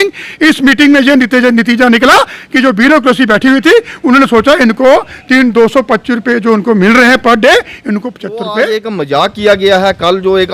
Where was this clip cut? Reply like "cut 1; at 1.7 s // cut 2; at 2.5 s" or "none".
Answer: cut 1; at 8.9 s